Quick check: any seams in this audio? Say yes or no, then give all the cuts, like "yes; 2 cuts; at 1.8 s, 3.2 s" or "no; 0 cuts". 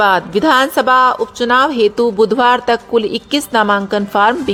no; 0 cuts